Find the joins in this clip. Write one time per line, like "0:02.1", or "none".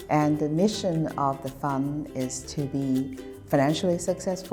none